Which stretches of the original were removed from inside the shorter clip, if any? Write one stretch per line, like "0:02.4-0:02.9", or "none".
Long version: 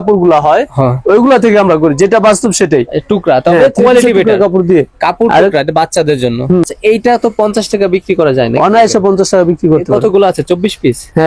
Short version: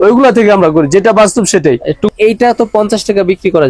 0:03.2-0:06.8